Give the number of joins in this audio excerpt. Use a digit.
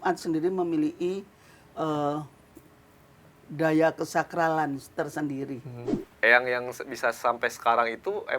1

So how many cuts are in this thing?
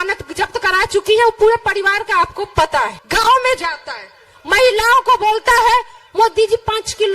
1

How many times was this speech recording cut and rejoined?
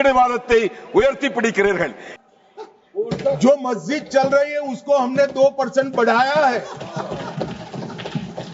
1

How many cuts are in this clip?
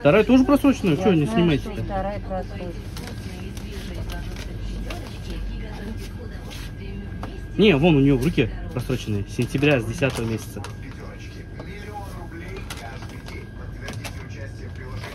0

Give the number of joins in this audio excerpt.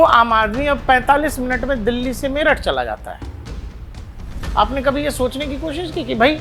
0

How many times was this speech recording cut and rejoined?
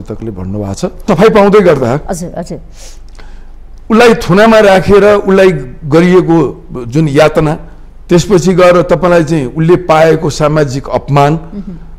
1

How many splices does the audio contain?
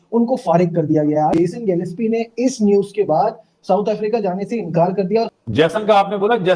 1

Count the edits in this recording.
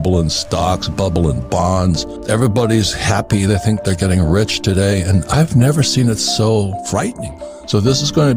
2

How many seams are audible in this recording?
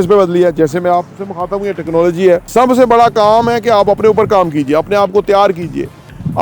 1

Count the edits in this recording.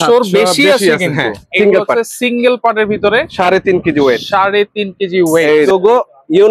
2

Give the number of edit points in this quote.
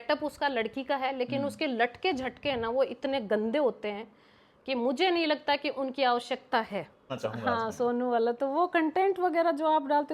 1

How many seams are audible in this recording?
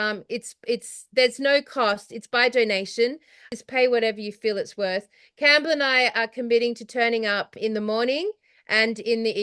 2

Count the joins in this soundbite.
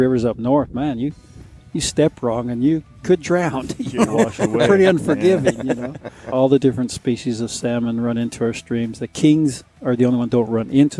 1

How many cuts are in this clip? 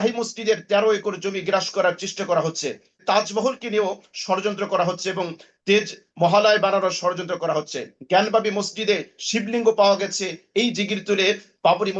1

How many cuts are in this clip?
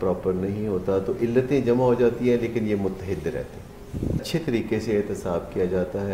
1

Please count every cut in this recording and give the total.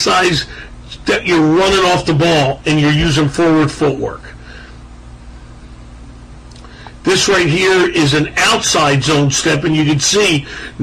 1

